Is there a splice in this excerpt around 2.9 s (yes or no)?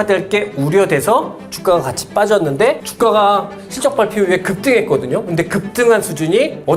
yes